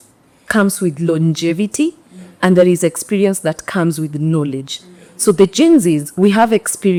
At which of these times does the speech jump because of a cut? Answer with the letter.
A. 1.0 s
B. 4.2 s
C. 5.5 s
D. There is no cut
D